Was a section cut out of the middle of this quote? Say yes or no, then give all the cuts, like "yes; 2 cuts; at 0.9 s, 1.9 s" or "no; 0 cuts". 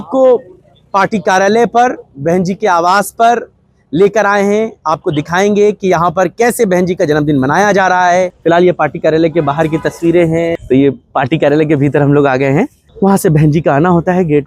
yes; 3 cuts; at 8.3 s, 10.6 s, 12.8 s